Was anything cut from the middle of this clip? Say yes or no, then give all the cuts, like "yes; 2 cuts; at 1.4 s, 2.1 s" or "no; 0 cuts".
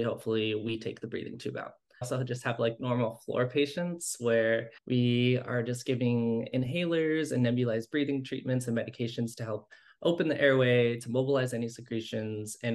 yes; 2 cuts; at 2.1 s, 4.8 s